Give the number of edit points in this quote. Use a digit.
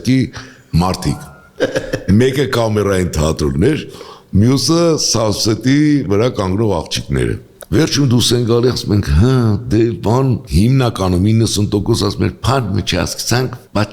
1